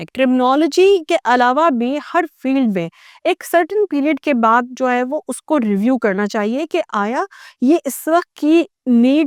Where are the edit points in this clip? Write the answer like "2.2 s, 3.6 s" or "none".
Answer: none

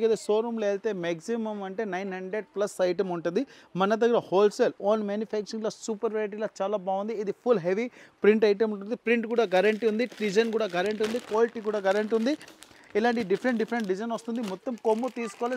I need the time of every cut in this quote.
none

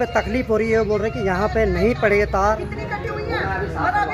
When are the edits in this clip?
2.6 s

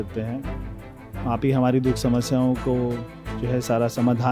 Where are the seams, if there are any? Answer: none

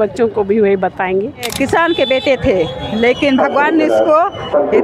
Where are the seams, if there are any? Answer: 1.5 s

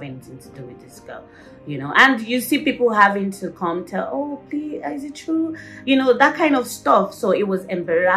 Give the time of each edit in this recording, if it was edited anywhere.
none

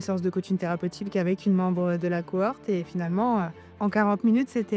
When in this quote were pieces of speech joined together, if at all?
none

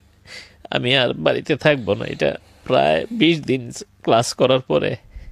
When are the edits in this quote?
none

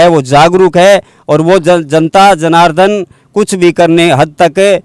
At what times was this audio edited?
none

